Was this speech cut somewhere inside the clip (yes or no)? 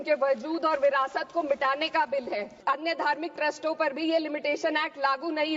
yes